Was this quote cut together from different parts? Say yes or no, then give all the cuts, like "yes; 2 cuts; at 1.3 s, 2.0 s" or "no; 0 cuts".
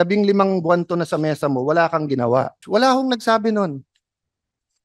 yes; 1 cut; at 2.6 s